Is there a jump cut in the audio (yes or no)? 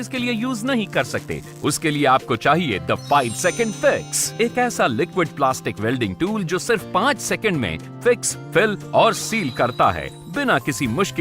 yes